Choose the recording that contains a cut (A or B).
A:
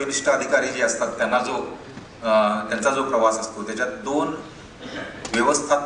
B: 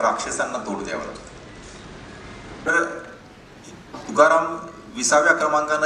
B